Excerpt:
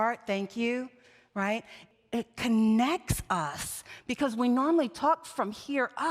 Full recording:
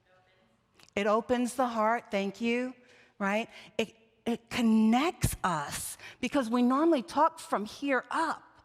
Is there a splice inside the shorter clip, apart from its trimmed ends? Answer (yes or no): yes